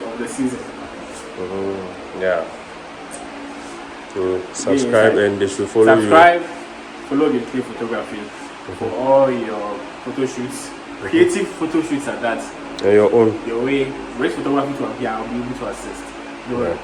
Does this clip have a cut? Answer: no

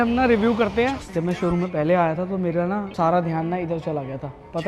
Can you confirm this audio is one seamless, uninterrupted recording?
no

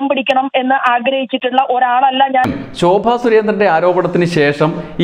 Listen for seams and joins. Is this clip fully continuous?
no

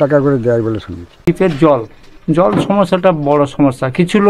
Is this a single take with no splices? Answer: no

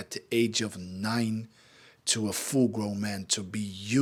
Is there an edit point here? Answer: no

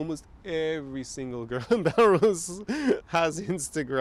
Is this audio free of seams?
yes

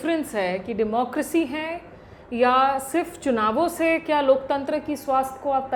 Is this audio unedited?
yes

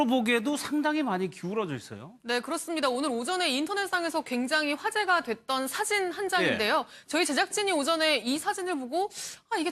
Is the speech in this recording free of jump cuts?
yes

